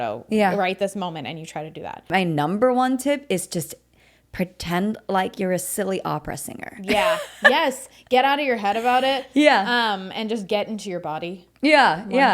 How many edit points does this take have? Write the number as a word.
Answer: one